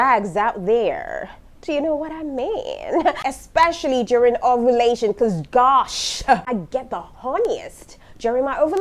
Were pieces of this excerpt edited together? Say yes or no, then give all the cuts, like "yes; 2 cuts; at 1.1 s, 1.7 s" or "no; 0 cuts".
yes; 2 cuts; at 3.3 s, 6.4 s